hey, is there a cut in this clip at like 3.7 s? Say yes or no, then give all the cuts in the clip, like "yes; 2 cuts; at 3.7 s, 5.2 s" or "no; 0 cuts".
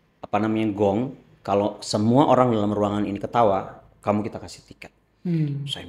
no; 0 cuts